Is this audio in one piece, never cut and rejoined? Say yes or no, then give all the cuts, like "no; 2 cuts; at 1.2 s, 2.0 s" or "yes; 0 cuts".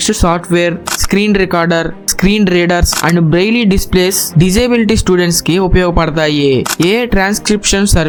yes; 0 cuts